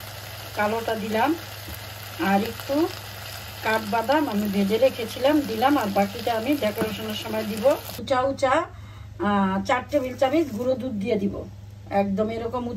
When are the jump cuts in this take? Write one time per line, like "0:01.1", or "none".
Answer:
0:08.0